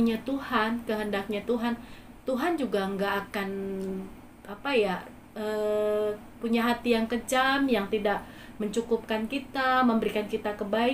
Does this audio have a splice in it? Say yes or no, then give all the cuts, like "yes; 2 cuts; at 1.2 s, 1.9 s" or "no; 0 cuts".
no; 0 cuts